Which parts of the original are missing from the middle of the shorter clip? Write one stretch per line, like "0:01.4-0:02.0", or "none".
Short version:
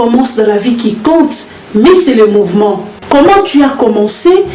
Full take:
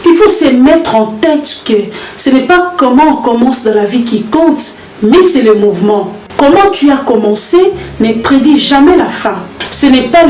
none